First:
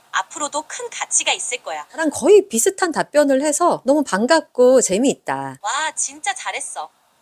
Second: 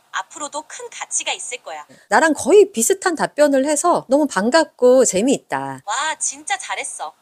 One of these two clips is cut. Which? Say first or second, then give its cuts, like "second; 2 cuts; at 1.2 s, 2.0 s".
first; 1 cut; at 2.0 s